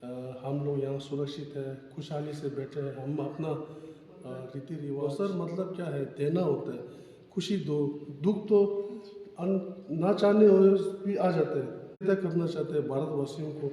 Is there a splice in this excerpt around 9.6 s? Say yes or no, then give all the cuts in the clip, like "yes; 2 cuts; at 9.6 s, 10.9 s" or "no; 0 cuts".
no; 2 cuts; at 5.0 s, 12.0 s